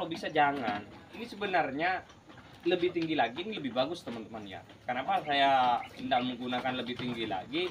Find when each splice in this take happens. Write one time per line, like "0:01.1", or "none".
0:01.3